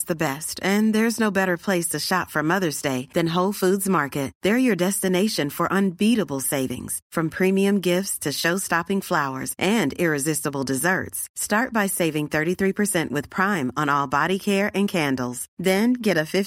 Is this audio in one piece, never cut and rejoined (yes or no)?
yes